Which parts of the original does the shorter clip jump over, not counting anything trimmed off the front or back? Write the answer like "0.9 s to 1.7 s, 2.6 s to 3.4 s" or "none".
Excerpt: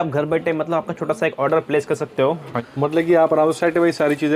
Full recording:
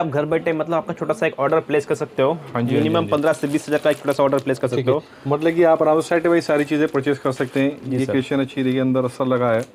2.6 s to 5.1 s